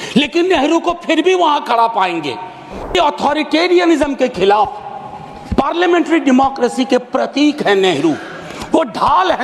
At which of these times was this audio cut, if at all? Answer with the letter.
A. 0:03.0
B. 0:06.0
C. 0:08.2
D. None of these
A